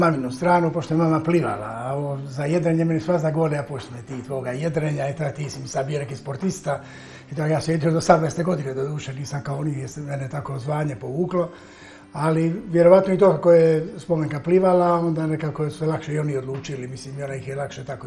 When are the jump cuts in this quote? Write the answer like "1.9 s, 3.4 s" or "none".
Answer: none